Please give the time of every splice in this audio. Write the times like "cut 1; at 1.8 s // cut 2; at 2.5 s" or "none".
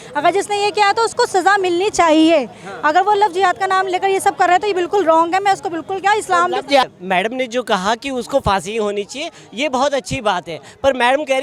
none